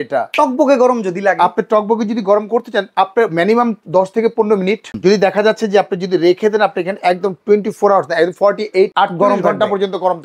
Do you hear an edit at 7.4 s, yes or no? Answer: no